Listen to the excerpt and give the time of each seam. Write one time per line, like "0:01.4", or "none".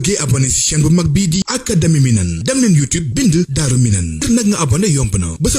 0:01.4